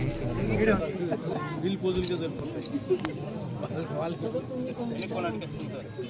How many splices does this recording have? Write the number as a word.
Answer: one